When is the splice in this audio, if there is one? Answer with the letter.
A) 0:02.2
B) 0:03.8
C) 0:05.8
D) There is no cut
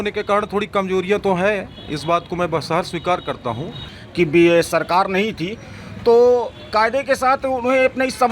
B